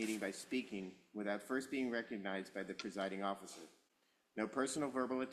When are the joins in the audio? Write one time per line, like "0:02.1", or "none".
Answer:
none